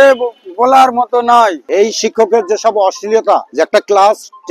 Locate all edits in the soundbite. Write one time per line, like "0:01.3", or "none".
0:01.6
0:03.5